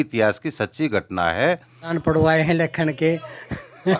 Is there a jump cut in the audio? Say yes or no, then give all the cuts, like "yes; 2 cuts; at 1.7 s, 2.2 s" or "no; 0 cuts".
yes; 1 cut; at 1.9 s